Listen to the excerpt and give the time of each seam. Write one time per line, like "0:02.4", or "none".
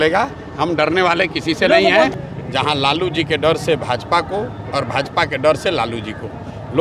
0:02.1